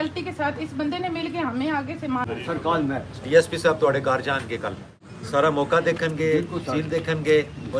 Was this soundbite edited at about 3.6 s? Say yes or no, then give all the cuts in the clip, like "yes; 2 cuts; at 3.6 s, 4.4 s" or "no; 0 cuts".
no; 2 cuts; at 2.2 s, 4.9 s